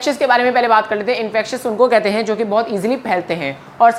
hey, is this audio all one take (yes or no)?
yes